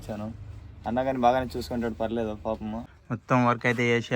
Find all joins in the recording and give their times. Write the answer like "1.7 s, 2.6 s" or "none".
2.8 s